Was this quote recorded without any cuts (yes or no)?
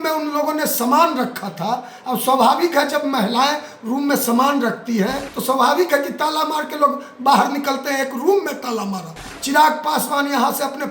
no